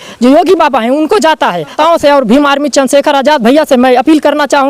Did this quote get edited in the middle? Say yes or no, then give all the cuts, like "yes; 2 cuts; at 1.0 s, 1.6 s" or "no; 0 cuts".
yes; 1 cut; at 1.7 s